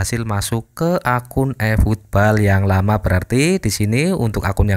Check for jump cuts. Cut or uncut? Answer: uncut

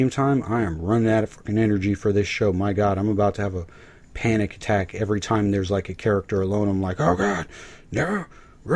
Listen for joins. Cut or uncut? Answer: uncut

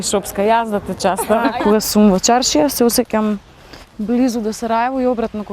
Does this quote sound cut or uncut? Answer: cut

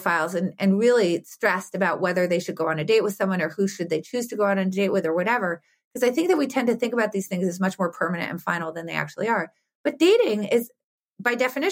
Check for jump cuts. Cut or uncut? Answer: uncut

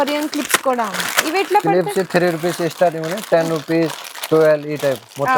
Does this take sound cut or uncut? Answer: uncut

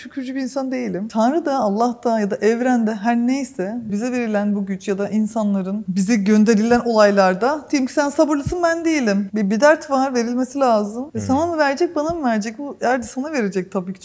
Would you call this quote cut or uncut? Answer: cut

